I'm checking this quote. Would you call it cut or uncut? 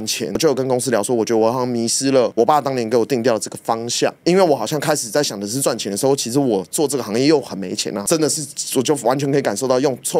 uncut